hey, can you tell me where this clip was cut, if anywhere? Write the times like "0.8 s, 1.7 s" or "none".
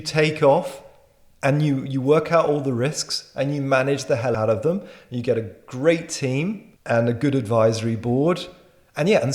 4.3 s